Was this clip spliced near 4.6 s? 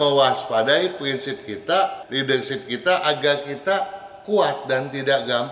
no; 1 cut; at 2.0 s

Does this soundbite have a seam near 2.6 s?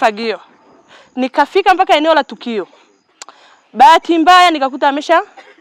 no; 0 cuts

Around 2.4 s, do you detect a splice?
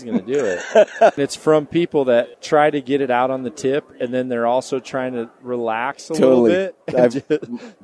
yes; 2 cuts; at 1.2 s, 2.4 s

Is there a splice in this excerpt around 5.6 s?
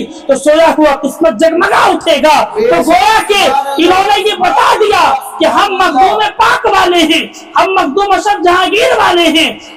no; 0 cuts

